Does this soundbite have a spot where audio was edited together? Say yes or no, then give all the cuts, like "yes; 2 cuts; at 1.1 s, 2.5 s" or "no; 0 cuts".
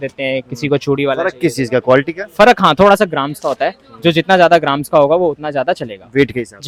no; 0 cuts